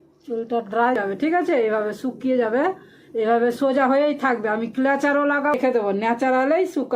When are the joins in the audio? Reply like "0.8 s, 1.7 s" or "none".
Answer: 1.0 s, 5.6 s